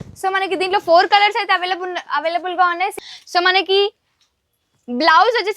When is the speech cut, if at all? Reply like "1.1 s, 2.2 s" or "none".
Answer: 3.0 s